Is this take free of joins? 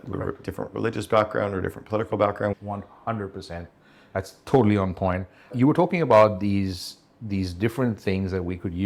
yes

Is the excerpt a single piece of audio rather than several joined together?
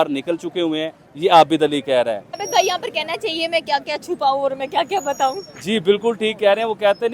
no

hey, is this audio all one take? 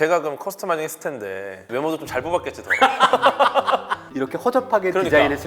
no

